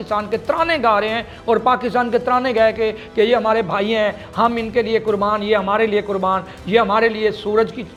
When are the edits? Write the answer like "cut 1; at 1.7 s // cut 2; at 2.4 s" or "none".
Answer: none